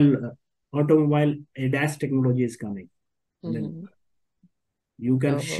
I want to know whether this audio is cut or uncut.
uncut